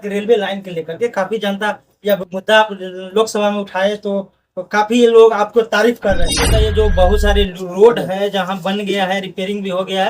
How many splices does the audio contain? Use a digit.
1